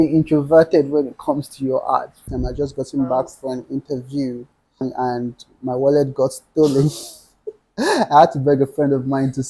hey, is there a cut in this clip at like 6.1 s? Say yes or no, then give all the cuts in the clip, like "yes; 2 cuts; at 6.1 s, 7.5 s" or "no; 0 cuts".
no; 2 cuts; at 2.3 s, 4.8 s